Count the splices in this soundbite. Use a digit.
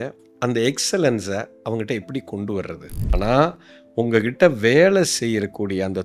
1